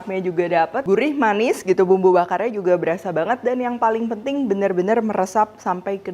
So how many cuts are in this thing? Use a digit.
0